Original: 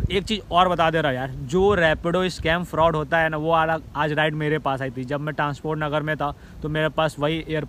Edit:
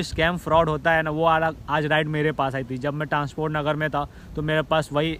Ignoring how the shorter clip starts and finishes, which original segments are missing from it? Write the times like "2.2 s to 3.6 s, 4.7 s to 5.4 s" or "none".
none